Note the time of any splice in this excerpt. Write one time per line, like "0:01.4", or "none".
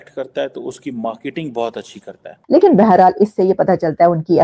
0:02.3

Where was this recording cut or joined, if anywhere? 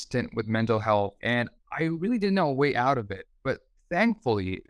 0:01.2

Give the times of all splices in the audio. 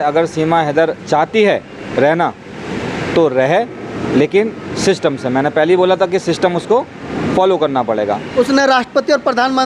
none

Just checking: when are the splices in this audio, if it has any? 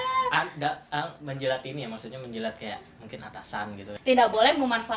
0:03.9

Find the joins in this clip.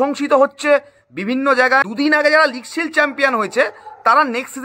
0:01.8

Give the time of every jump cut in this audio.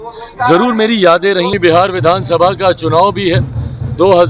0:01.6

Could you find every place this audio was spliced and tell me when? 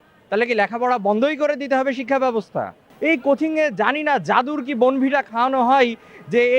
0:02.8

